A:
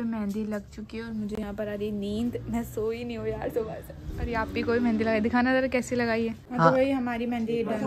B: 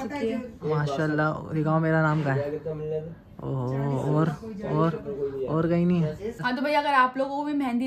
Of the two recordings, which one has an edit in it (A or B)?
B